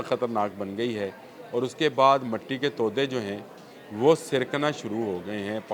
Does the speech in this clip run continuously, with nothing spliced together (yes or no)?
yes